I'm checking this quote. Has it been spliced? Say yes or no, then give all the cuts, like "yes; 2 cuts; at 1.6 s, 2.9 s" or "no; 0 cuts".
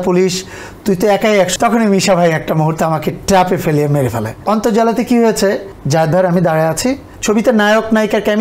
yes; 4 cuts; at 1.5 s, 4.3 s, 5.7 s, 7.1 s